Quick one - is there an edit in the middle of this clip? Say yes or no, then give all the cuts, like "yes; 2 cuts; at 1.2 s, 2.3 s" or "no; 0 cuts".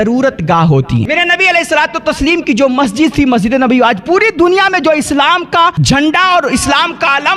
yes; 2 cuts; at 1.1 s, 5.8 s